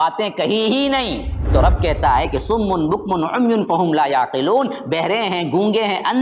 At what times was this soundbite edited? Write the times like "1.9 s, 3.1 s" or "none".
1.4 s